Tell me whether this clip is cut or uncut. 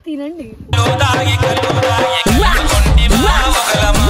uncut